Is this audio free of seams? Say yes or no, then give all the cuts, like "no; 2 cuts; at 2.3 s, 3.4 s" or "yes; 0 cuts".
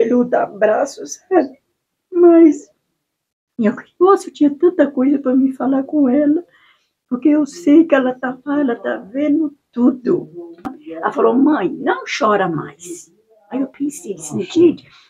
no; 1 cut; at 10.4 s